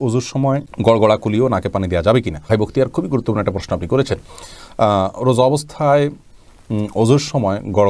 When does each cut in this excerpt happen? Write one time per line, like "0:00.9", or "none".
none